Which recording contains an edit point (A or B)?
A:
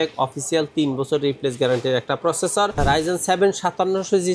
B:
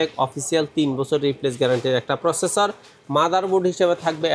A